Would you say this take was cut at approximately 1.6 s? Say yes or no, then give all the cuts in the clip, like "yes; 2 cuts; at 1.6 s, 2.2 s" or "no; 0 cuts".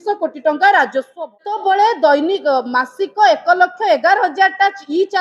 yes; 1 cut; at 1.6 s